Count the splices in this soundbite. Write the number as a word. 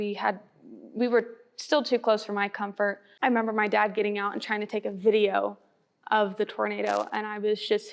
one